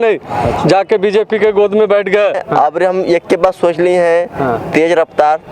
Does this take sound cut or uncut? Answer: cut